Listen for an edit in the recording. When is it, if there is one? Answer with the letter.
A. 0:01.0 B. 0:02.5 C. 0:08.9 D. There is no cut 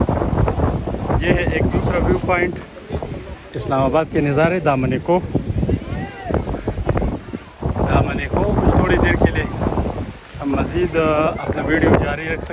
D